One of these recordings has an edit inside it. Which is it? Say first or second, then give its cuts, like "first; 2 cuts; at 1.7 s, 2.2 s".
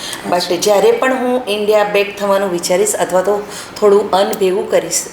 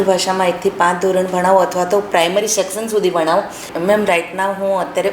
second; 1 cut; at 3.7 s